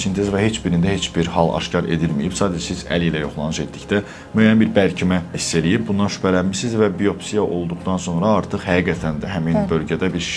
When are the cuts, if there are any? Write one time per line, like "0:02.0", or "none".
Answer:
none